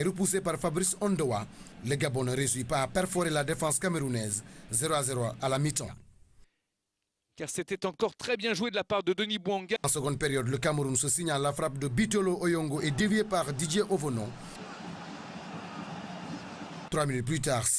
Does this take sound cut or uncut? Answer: uncut